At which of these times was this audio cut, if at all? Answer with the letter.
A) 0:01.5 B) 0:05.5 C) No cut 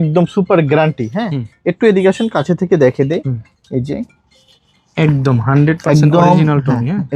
C